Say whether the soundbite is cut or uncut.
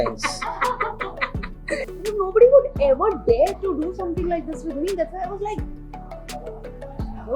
cut